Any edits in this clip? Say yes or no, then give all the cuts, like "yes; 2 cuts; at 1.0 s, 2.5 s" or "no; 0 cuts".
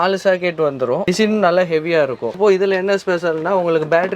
yes; 2 cuts; at 1.0 s, 2.3 s